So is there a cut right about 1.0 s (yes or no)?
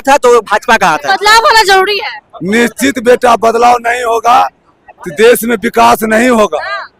yes